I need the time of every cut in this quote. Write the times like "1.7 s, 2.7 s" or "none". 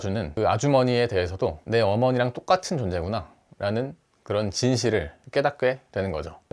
1.6 s